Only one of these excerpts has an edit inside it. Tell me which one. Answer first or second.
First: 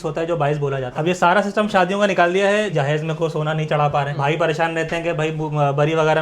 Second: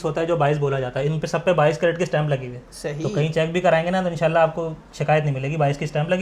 first